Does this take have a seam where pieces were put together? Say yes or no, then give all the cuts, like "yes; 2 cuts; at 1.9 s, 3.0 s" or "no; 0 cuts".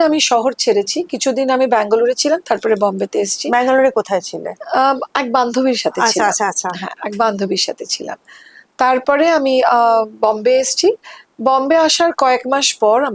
no; 0 cuts